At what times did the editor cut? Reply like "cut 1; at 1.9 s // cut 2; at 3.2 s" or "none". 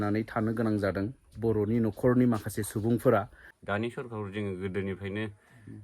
cut 1; at 3.5 s